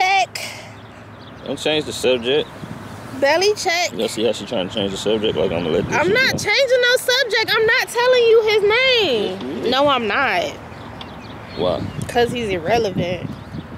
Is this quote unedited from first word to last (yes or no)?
yes